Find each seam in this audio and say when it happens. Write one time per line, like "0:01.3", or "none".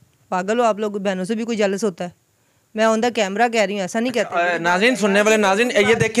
none

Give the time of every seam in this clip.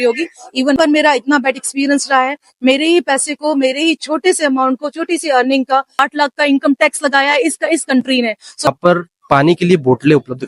0:00.8
0:06.0
0:08.7

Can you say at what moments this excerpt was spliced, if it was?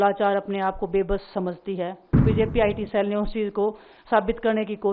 0:02.2

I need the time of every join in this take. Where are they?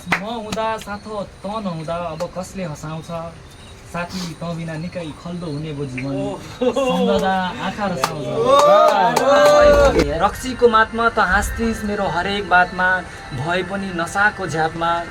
0:10.1

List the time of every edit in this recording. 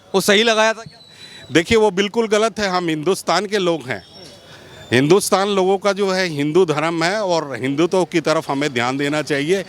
none

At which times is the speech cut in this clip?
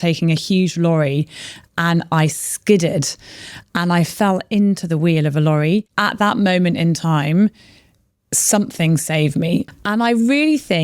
0:05.9
0:09.7

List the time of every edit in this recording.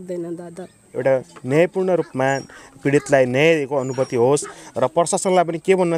0:00.9

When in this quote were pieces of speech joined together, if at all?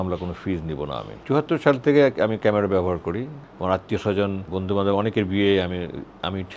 0:01.2
0:03.4
0:04.5

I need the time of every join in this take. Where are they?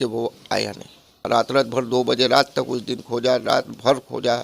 0:01.3

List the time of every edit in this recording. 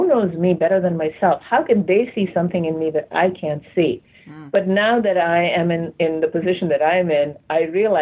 none

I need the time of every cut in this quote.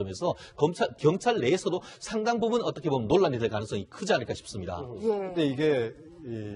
0:01.7

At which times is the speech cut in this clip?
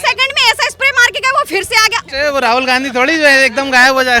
0:02.1

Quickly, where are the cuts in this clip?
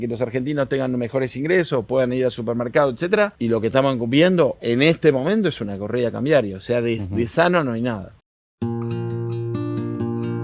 0:03.4
0:04.6
0:08.2

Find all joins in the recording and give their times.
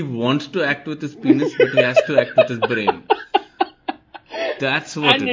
0:01.3

